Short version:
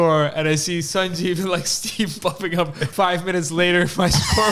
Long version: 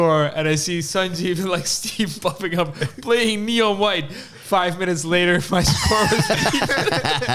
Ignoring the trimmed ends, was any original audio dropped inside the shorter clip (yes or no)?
yes